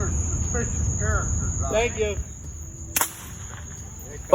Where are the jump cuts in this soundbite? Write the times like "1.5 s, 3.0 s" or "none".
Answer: 2.3 s